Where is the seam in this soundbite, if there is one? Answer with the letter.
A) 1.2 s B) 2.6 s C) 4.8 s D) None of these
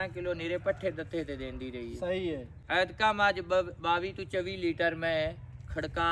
D